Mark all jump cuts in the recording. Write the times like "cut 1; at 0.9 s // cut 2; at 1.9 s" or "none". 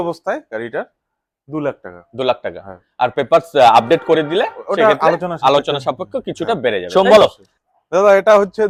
none

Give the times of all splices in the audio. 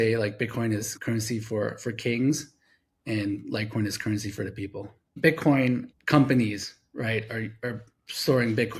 cut 1; at 0.9 s // cut 2; at 5.2 s

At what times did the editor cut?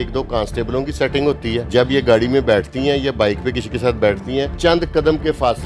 cut 1; at 1.7 s // cut 2; at 4.5 s

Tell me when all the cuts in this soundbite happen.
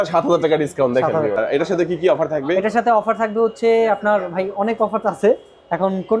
cut 1; at 1.4 s

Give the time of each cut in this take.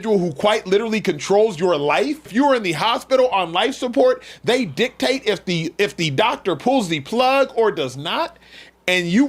cut 1; at 2.2 s

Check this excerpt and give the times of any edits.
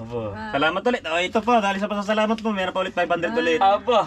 none

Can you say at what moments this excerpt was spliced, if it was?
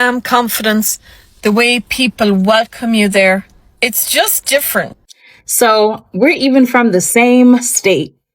cut 1; at 5.0 s

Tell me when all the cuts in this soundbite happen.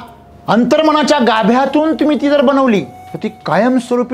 cut 1; at 3.0 s

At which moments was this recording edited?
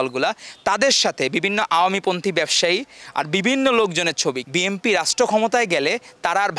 cut 1; at 4.4 s

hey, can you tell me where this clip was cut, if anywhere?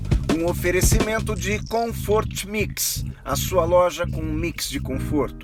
none

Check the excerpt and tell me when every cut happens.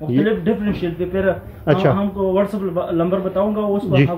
none

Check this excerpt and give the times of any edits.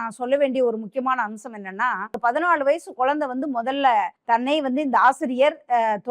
cut 1; at 2.2 s // cut 2; at 4.2 s

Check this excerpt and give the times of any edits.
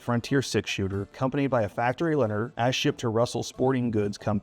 cut 1; at 1.1 s // cut 2; at 2.5 s

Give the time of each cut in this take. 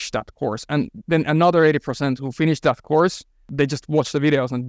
cut 1; at 3.5 s

